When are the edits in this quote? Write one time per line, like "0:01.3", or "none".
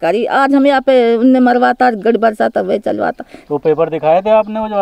0:03.3